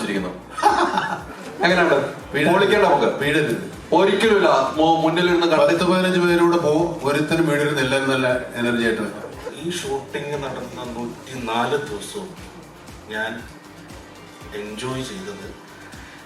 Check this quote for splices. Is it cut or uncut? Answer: cut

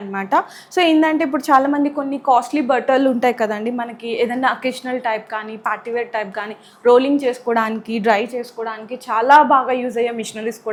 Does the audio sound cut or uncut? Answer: uncut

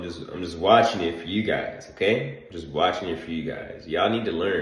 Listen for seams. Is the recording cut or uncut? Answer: uncut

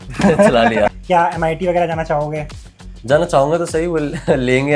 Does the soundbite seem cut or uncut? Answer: cut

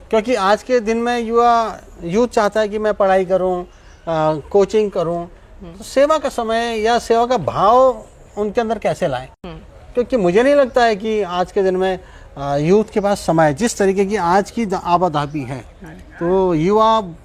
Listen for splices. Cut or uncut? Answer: uncut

